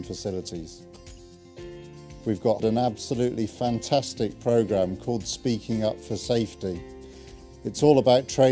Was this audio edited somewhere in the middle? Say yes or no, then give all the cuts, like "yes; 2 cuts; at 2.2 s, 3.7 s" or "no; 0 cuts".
yes; 1 cut; at 1.7 s